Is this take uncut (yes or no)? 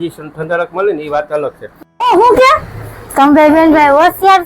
no